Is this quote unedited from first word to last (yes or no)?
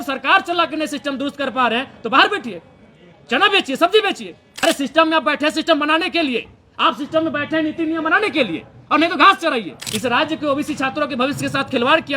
no